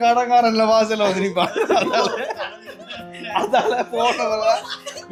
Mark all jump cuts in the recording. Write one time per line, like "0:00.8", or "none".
none